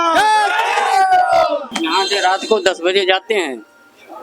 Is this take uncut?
no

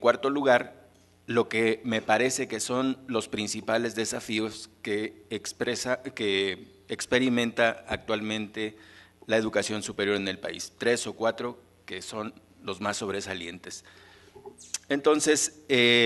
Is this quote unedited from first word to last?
yes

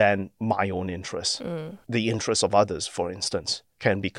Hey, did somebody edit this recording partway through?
no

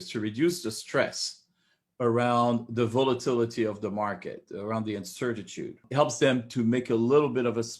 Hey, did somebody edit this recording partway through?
yes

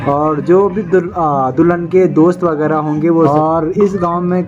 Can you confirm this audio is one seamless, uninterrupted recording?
no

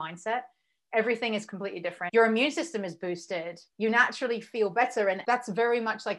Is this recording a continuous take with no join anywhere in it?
no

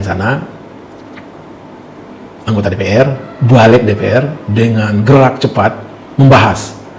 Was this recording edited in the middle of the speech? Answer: no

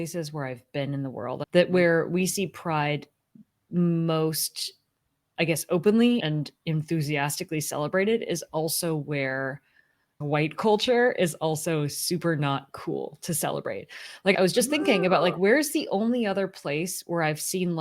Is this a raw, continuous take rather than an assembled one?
no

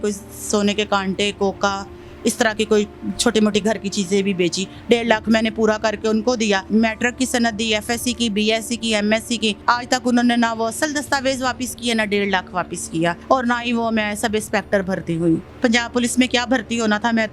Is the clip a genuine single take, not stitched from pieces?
no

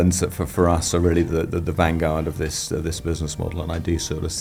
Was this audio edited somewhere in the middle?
no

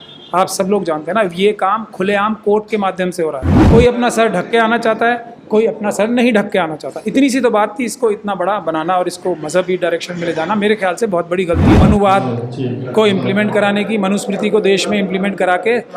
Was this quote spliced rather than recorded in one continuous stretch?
yes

